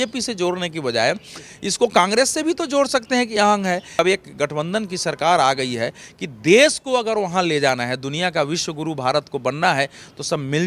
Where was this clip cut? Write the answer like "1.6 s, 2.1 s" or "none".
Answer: 4.0 s